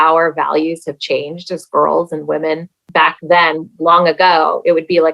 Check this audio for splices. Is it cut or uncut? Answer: cut